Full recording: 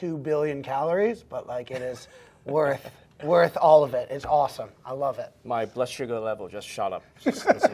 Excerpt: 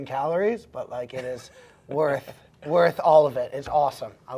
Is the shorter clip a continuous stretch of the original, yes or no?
yes